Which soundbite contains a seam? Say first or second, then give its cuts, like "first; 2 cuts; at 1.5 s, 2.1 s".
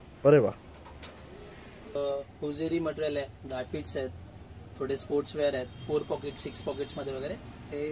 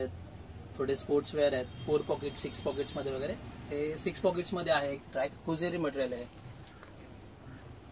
first; 1 cut; at 1.9 s